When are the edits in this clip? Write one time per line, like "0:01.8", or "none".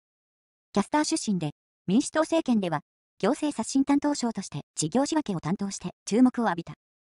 0:03.7